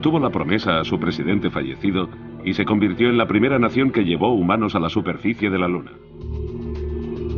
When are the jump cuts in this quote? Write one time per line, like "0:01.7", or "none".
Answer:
0:04.2

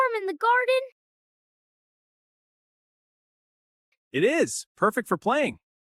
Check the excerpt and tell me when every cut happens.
none

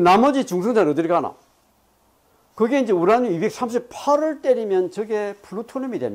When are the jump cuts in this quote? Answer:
0:03.6

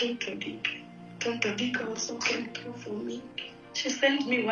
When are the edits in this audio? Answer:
0:03.4

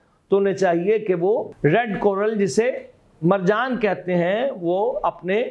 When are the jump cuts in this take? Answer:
0:01.5

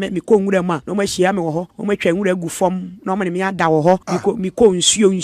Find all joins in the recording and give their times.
0:00.8
0:01.7
0:04.1

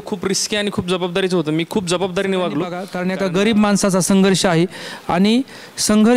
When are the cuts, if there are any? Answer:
0:02.9

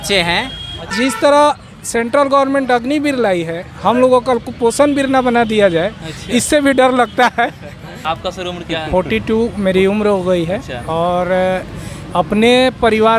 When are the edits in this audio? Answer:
0:00.9
0:08.0

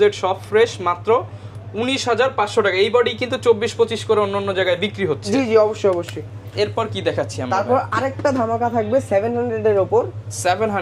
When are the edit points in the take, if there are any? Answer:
none

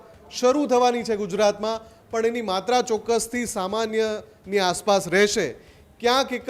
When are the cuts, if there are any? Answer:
none

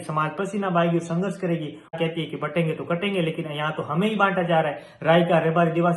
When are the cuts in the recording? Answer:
0:01.9

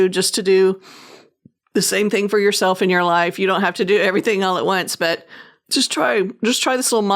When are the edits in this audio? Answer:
none

